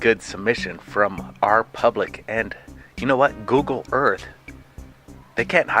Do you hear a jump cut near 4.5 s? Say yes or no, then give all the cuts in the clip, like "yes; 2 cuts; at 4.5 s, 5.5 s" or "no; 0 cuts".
no; 1 cut; at 1.2 s